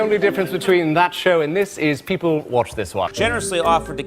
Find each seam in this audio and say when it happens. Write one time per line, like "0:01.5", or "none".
0:03.1